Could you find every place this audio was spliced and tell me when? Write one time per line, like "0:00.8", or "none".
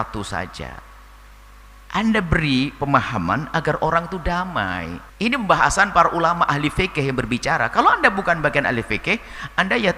0:05.0